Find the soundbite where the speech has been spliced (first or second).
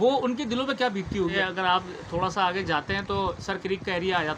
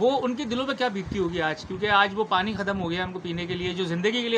first